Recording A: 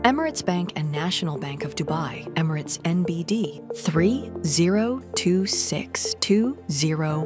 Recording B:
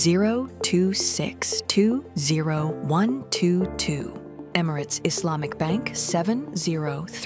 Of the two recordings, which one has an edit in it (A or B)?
B